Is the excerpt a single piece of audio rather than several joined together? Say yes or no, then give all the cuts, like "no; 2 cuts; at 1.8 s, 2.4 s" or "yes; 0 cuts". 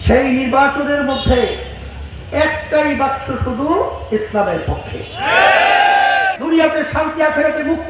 no; 1 cut; at 6.4 s